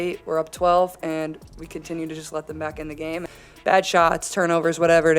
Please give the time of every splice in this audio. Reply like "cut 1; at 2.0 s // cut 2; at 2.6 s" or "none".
cut 1; at 3.3 s